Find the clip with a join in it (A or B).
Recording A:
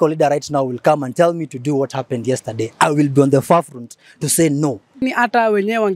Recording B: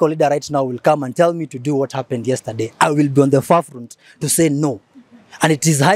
A